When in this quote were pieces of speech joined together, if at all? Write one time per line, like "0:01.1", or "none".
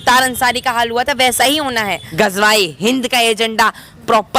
0:02.0